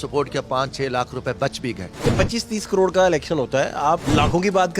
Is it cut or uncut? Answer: cut